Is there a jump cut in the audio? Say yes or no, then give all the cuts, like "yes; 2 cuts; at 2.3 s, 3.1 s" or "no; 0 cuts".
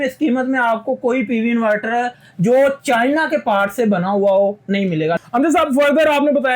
yes; 1 cut; at 5.1 s